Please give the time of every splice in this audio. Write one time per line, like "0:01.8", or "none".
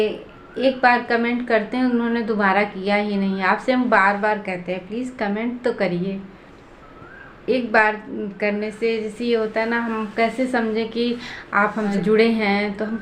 0:11.9